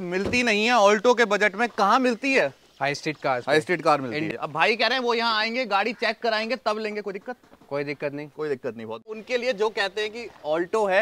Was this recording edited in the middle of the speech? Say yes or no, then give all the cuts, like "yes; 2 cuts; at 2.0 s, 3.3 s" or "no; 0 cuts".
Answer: yes; 2 cuts; at 4.3 s, 9.1 s